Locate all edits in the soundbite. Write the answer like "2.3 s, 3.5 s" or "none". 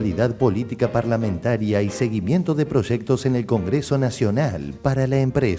none